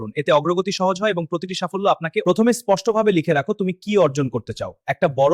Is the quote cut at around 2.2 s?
yes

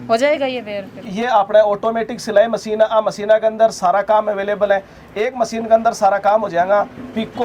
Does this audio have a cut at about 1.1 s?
yes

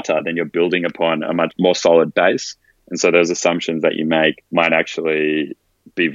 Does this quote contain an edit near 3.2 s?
no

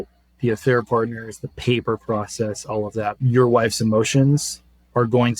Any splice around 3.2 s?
yes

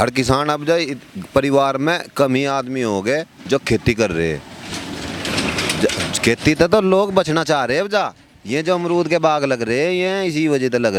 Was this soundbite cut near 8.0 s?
no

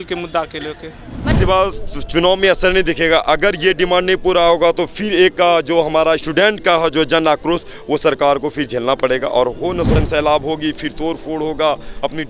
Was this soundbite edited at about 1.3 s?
yes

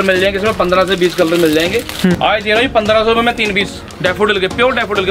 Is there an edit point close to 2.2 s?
yes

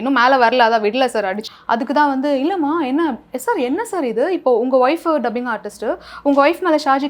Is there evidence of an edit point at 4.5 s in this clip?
no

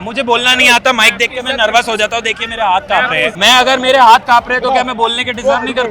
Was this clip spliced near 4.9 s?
no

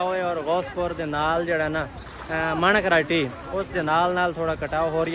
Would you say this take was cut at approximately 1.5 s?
no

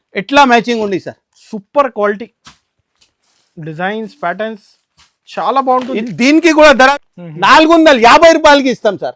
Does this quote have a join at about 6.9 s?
yes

